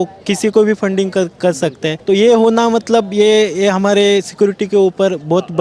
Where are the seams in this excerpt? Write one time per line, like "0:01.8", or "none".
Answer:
0:01.9